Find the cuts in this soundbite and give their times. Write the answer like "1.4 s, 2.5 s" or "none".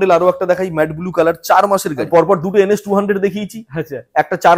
2.0 s